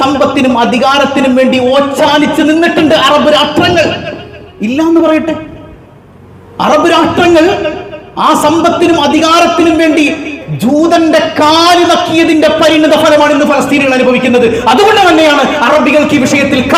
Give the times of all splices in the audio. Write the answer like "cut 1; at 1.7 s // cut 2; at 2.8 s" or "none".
none